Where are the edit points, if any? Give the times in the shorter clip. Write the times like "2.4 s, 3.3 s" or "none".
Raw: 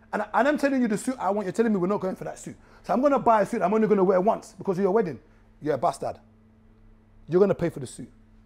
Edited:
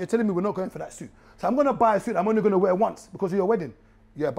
none